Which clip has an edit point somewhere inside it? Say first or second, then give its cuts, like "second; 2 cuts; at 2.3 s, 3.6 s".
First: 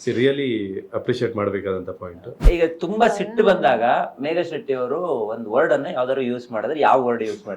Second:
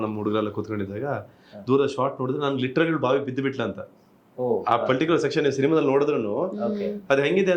first; 1 cut; at 2.4 s